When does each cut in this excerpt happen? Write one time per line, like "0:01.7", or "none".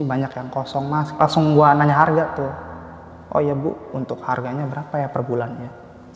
0:01.2